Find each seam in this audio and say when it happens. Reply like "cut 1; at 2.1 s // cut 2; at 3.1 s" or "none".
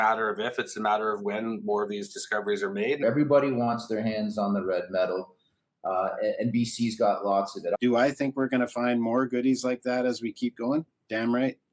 cut 1; at 3.0 s // cut 2; at 7.7 s